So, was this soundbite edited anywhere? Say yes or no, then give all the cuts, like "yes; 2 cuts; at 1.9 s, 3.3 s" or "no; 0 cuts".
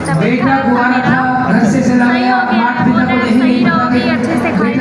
no; 0 cuts